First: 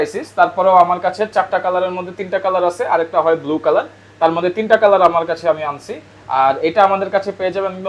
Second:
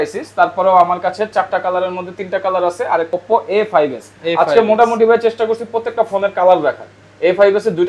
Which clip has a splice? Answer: second; 1 cut; at 3.1 s

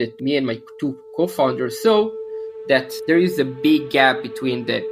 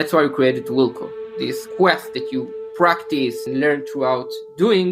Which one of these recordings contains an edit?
second; 2 cuts; at 1.6 s, 3.4 s

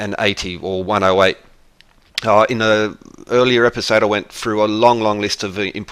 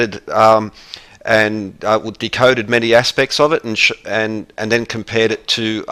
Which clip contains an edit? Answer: second; 1 cut; at 3.5 s

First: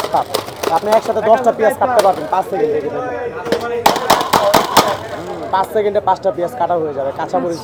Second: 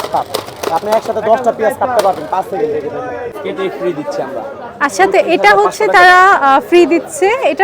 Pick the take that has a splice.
second; 1 cut; at 3.4 s

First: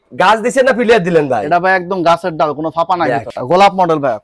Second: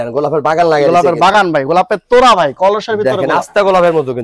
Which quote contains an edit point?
first; 1 cut; at 3.3 s

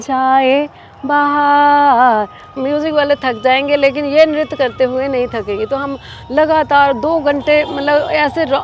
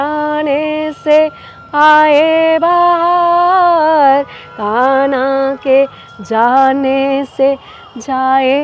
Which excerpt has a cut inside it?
first; 1 cut; at 2.6 s

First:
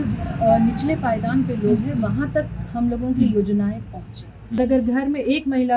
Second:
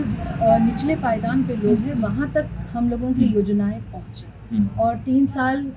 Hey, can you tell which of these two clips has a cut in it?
first; 1 cut; at 4.6 s

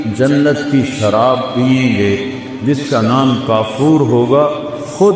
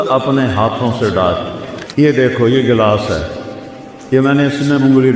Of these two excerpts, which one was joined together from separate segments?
second; 1 cut; at 1.7 s

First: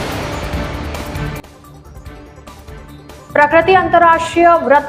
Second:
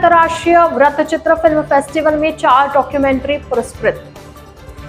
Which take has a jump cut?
first; 1 cut; at 3.0 s

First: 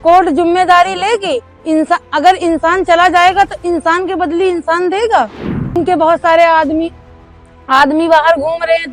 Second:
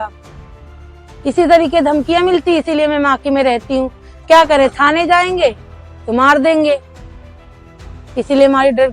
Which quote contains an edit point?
first; 1 cut; at 5.8 s

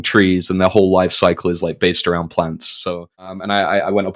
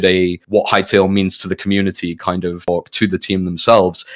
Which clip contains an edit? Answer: first; 1 cut; at 3.1 s

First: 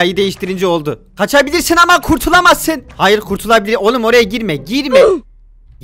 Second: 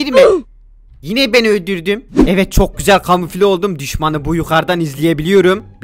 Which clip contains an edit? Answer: second; 1 cut; at 2.1 s

